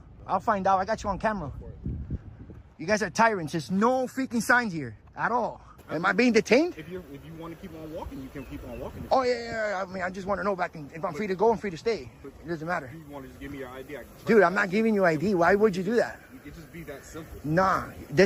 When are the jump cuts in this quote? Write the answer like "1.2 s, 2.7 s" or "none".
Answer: 5.7 s